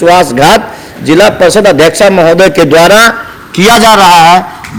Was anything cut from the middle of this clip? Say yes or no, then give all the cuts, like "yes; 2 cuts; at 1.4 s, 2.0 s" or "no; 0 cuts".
no; 0 cuts